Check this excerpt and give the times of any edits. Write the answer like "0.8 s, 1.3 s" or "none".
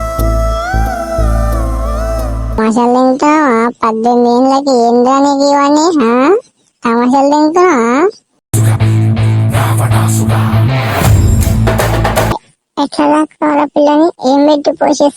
2.6 s, 12.4 s